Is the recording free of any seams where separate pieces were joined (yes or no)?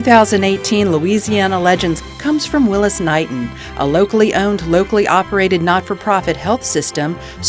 no